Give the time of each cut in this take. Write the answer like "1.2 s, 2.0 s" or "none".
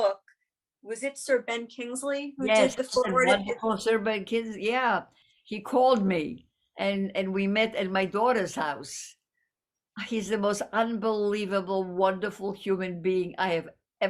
5.2 s